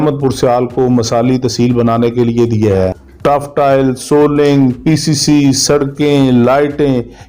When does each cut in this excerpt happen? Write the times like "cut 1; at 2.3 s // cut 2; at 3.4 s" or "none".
cut 1; at 3.0 s